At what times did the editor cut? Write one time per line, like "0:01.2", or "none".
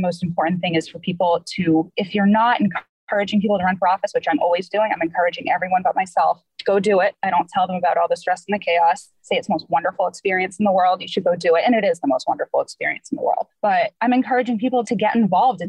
0:02.0
0:13.7
0:14.9